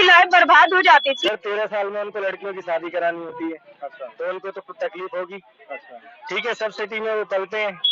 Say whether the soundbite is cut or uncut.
cut